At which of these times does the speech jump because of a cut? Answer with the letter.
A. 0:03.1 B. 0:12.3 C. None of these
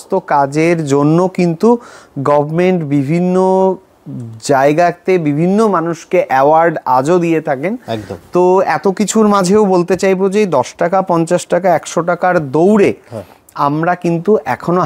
C